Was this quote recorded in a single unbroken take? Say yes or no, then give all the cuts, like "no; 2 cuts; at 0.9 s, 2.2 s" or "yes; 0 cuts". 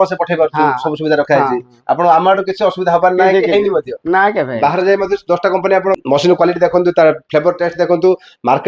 no; 2 cuts; at 4.5 s, 6.0 s